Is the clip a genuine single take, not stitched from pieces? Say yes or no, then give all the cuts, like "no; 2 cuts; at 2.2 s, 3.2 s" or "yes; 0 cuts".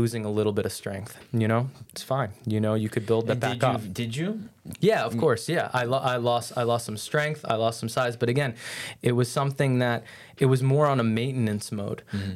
yes; 0 cuts